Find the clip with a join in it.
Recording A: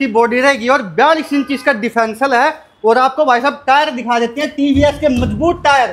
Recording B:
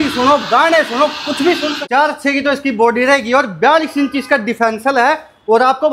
B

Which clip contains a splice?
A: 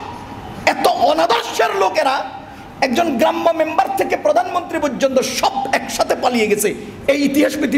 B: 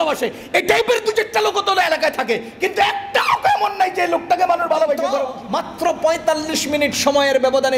B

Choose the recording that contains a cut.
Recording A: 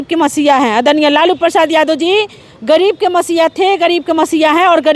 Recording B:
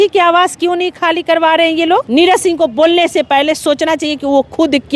B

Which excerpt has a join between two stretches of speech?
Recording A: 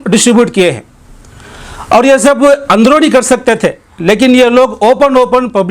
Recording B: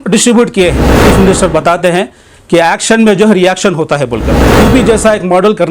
B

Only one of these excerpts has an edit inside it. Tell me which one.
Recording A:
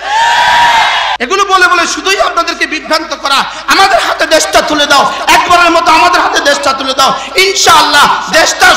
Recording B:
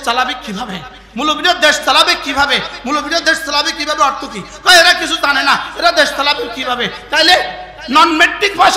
A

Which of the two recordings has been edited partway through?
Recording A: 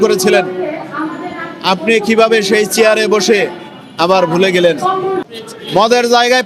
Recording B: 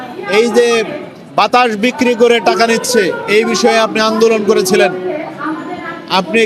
A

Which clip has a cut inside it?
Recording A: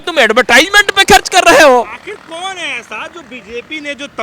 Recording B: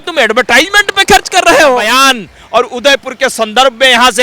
B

